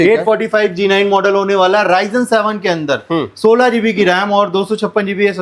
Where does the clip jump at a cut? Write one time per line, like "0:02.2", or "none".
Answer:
none